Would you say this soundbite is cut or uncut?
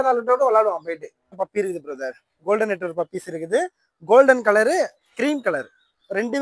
cut